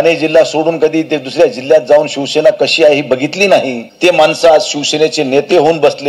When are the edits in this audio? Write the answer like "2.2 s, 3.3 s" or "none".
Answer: 3.8 s